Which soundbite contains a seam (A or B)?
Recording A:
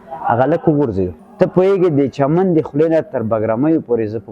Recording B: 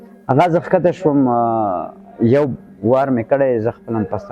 A